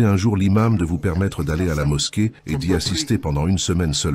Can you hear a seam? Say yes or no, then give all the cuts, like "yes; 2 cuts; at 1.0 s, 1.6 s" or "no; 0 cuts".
no; 0 cuts